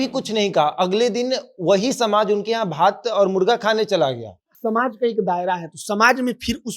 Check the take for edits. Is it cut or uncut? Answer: cut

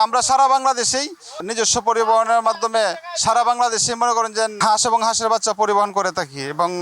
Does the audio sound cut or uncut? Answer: cut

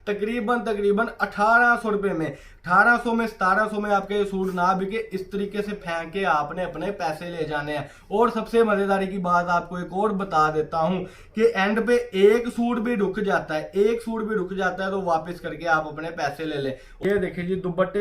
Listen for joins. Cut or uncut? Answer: cut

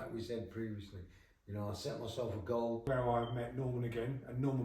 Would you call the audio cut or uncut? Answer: cut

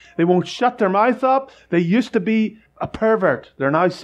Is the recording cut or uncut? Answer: cut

